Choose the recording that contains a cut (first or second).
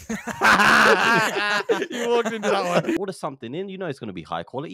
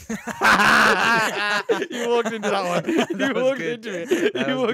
first